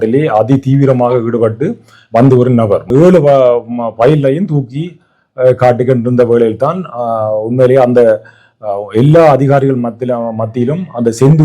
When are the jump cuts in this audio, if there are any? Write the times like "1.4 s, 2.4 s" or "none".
2.9 s